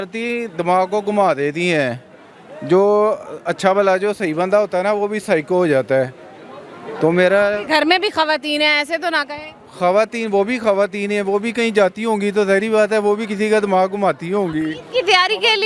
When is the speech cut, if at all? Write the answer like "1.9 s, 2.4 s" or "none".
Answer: none